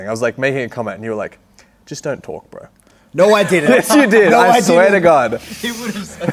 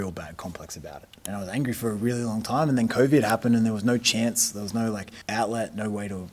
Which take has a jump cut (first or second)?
second